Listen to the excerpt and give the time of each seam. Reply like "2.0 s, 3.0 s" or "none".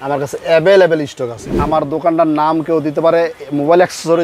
1.5 s